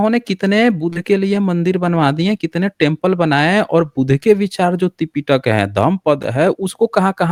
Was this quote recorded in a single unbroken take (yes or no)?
yes